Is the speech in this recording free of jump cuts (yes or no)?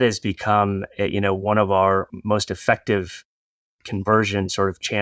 no